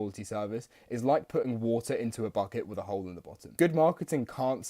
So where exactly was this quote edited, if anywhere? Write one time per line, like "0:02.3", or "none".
0:03.5